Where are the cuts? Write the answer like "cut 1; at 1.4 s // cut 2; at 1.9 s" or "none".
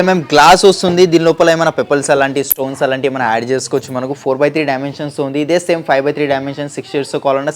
none